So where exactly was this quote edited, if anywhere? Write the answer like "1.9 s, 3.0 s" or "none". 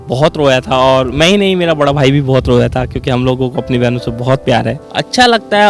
4.8 s